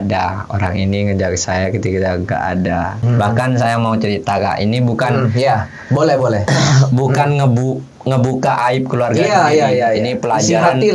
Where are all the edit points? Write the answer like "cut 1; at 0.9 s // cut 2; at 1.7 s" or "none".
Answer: cut 1; at 3.0 s